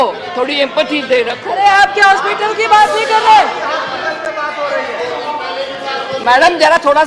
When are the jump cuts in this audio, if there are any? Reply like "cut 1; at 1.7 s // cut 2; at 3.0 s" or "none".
cut 1; at 1.4 s